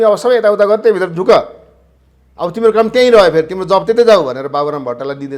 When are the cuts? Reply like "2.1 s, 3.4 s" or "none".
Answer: none